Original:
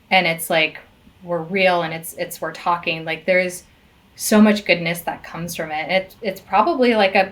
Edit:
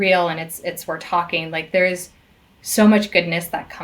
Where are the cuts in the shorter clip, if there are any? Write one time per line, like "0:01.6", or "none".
none